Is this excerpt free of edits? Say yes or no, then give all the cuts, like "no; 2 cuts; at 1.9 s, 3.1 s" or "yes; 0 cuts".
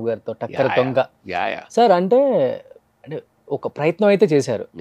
yes; 0 cuts